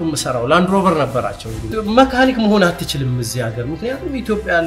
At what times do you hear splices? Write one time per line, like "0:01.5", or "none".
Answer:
0:01.7

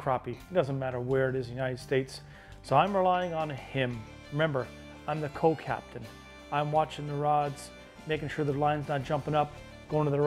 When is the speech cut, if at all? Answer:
none

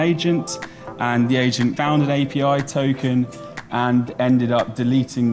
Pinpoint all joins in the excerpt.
0:01.8

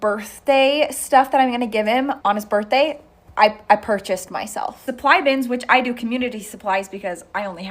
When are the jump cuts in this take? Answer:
0:02.2
0:04.8

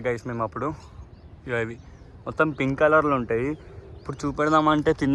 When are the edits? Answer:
none

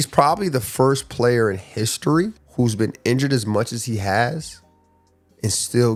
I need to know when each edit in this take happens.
none

